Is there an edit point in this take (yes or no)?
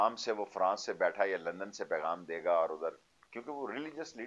no